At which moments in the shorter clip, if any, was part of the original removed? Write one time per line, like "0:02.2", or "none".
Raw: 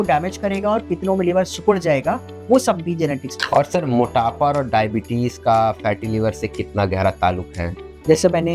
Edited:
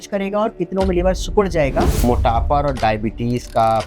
0:02.0